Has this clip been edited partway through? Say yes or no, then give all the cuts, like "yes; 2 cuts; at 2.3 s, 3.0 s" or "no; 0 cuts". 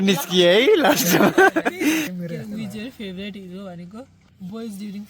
yes; 2 cuts; at 2.1 s, 4.2 s